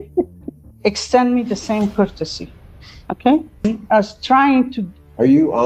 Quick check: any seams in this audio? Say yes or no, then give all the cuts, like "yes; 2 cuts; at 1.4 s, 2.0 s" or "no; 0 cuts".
yes; 1 cut; at 3.6 s